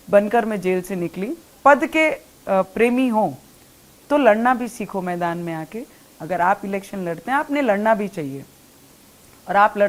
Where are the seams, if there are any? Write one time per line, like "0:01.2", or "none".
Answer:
0:01.5